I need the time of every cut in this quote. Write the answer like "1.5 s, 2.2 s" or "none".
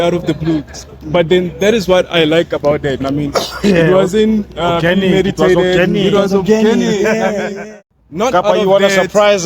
7.6 s

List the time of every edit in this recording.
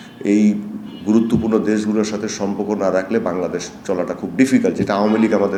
none

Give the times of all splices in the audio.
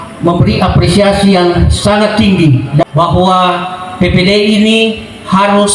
2.8 s

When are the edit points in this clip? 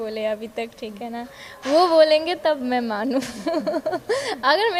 none

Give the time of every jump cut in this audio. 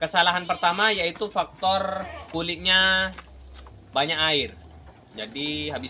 2.2 s

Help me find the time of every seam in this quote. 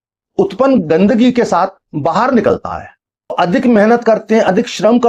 3.3 s

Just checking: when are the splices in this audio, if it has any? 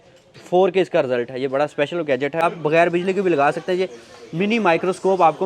2.4 s

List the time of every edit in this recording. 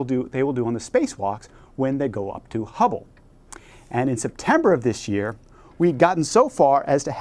none

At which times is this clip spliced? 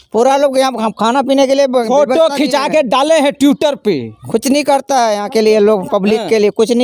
none

